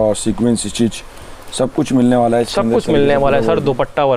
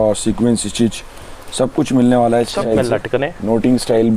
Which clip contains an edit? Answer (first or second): second